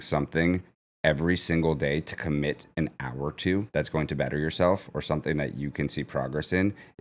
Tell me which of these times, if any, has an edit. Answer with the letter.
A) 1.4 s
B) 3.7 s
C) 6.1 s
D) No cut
B